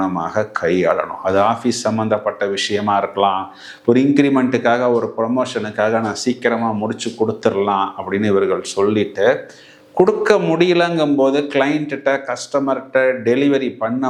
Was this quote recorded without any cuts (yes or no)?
yes